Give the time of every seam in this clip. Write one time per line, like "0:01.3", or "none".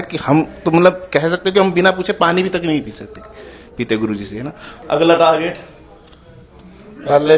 0:04.7